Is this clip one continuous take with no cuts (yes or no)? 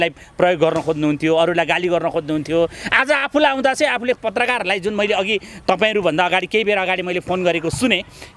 yes